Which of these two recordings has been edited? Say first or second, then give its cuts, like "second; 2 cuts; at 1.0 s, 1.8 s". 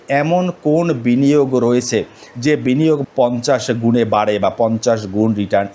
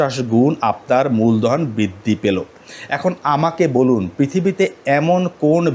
first; 1 cut; at 3.0 s